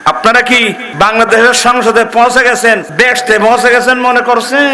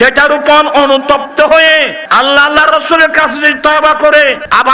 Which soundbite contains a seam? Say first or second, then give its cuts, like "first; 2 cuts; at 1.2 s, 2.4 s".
first; 2 cuts; at 0.9 s, 2.9 s